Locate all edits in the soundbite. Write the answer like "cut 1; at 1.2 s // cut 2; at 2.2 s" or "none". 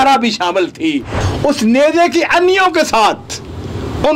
cut 1; at 1.1 s